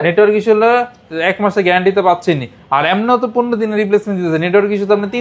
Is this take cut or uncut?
uncut